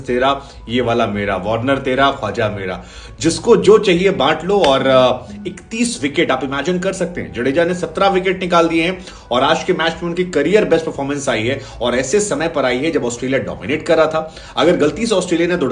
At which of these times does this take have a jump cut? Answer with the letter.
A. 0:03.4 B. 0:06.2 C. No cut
C